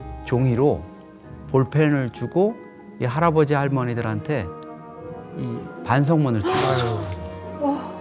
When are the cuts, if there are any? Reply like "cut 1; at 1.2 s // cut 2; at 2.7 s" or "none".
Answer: none

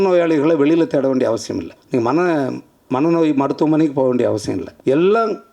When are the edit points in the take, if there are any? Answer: cut 1; at 1.7 s // cut 2; at 4.7 s

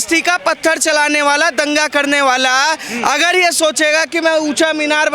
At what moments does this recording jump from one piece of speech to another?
none

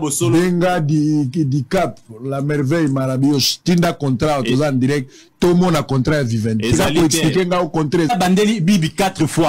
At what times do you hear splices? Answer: none

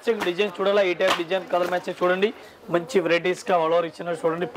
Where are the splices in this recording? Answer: cut 1; at 2.5 s

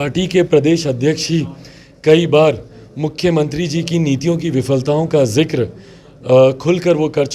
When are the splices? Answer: none

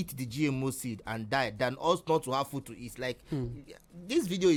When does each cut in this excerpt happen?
none

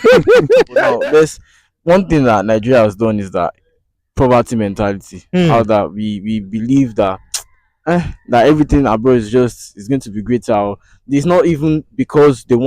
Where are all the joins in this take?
cut 1; at 1.0 s

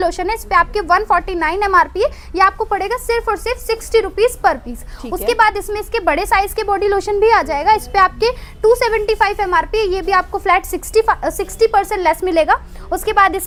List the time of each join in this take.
none

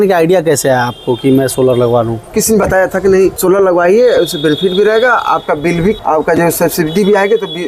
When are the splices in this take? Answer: cut 1; at 2.4 s // cut 2; at 3.4 s // cut 3; at 6.0 s

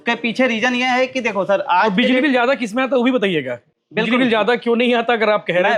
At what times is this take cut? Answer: none

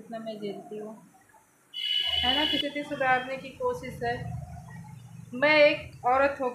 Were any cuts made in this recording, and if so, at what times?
cut 1; at 2.6 s

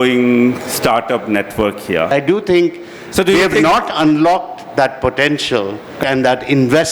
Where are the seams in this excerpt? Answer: cut 1; at 2.1 s // cut 2; at 6.0 s

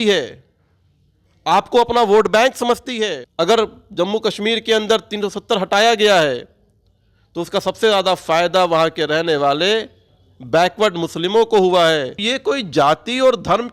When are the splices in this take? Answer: cut 1; at 3.2 s // cut 2; at 12.2 s

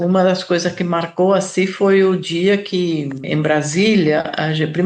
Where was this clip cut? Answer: cut 1; at 3.2 s

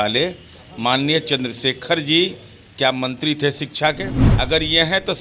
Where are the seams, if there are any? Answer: cut 1; at 4.2 s

